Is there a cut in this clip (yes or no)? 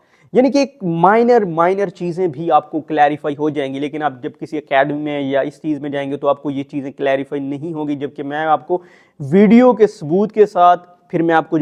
no